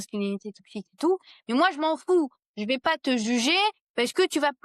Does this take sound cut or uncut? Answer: uncut